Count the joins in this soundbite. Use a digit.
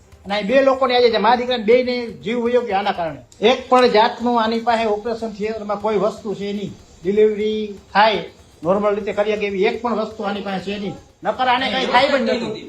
2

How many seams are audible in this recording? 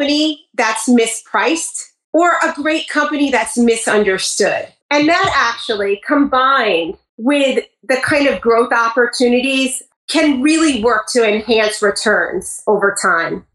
2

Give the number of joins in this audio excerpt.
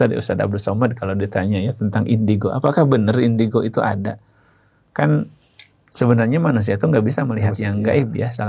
0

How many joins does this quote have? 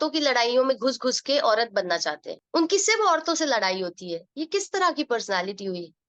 1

